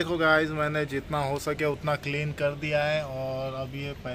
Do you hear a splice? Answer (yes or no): no